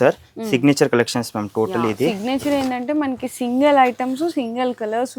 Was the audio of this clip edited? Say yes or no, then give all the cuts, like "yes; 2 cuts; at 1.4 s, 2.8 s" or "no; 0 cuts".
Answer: no; 0 cuts